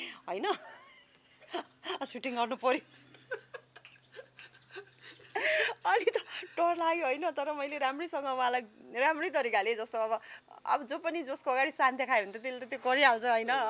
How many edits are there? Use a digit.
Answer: 0